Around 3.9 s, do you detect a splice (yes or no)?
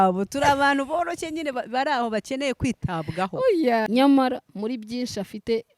yes